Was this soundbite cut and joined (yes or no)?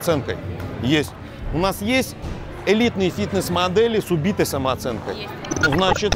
no